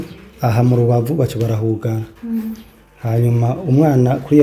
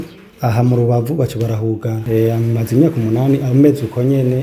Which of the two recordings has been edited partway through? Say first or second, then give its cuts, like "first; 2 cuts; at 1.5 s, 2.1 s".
second; 1 cut; at 2.0 s